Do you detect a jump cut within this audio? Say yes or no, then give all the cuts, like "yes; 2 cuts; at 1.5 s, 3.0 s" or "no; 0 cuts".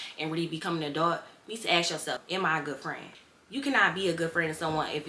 yes; 1 cut; at 2.2 s